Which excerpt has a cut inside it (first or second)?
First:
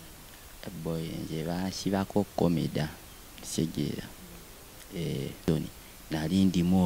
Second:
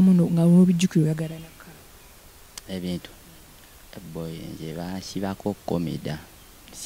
first